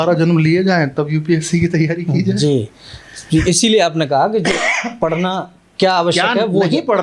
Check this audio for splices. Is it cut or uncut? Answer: uncut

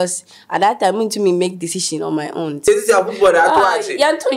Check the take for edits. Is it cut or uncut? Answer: cut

